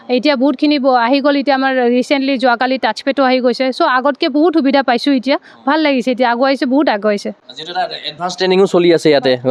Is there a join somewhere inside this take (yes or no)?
no